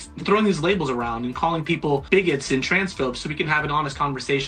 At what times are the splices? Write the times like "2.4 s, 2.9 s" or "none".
2.0 s